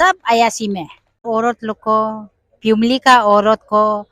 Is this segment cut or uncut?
cut